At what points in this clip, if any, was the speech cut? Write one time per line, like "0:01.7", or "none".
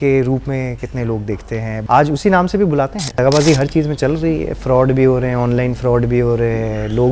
0:01.7
0:03.2